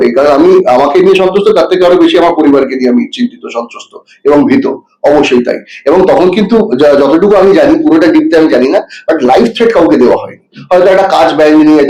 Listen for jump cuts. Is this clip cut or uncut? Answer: uncut